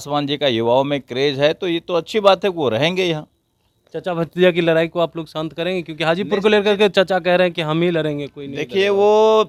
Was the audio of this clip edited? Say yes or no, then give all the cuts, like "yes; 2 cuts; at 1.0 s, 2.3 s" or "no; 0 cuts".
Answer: no; 0 cuts